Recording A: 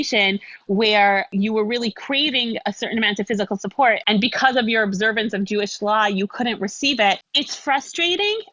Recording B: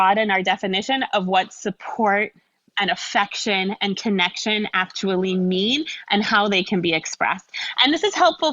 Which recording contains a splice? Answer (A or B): A